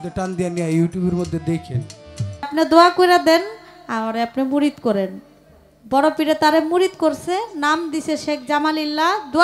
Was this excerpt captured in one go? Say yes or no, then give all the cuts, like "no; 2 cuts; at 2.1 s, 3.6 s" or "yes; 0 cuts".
no; 1 cut; at 2.5 s